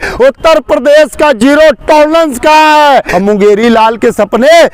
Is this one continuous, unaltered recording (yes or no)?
no